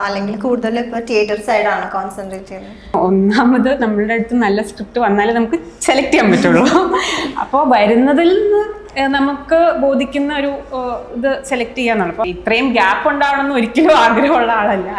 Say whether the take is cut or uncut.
cut